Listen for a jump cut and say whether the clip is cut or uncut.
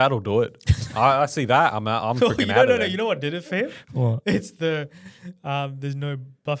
uncut